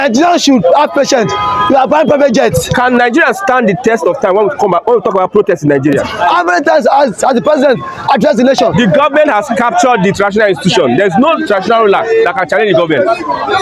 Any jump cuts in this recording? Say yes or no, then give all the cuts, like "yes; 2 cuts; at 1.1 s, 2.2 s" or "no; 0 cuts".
yes; 3 cuts; at 2.6 s, 6.2 s, 8.7 s